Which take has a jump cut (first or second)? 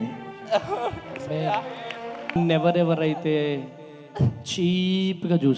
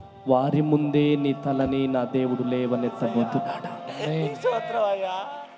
first